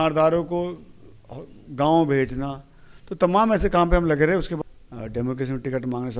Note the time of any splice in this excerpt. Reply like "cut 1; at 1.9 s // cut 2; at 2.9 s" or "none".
cut 1; at 4.5 s